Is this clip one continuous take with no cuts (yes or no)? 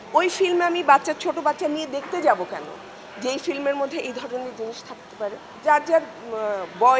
no